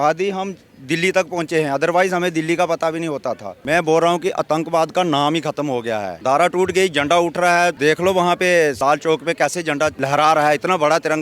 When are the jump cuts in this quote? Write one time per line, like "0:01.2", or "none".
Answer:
0:03.5
0:06.1
0:07.8
0:08.8
0:10.0